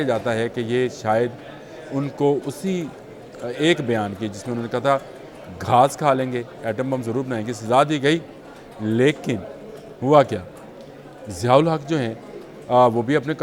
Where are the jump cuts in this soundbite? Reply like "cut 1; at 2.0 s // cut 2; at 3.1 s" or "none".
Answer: none